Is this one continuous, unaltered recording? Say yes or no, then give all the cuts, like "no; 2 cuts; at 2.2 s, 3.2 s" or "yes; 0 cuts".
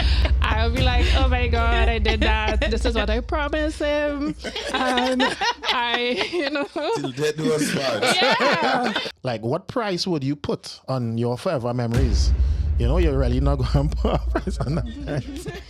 no; 1 cut; at 9.1 s